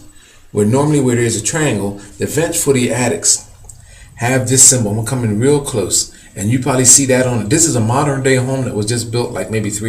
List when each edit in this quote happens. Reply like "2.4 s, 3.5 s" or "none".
8.6 s